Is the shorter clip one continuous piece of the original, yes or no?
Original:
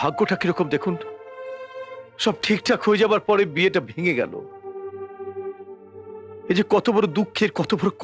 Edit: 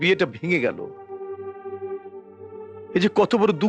yes